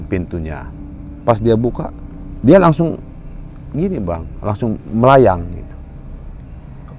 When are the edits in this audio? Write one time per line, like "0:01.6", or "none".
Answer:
0:01.1